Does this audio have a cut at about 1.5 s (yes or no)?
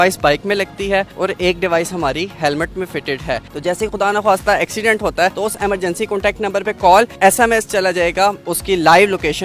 no